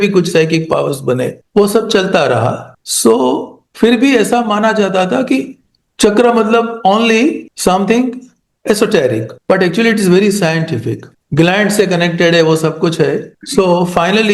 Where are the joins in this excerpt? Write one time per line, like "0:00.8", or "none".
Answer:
none